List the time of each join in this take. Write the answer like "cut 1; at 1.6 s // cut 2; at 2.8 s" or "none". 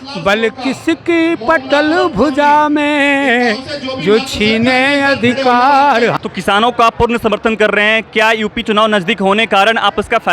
cut 1; at 6.2 s